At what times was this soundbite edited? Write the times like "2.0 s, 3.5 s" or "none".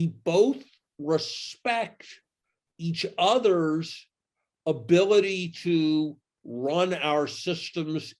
none